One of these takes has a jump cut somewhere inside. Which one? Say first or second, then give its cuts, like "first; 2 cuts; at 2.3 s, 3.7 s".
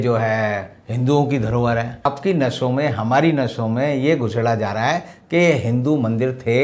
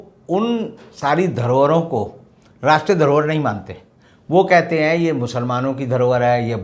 first; 1 cut; at 2.1 s